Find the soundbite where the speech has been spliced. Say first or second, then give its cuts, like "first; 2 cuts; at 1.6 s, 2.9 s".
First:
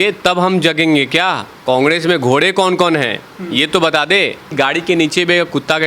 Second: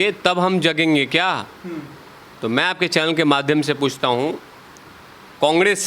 first; 2 cuts; at 1.5 s, 4.5 s